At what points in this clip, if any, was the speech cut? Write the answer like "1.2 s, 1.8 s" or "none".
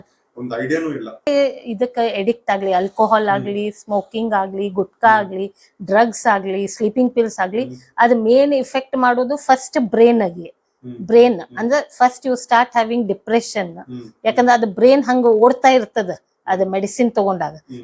1.3 s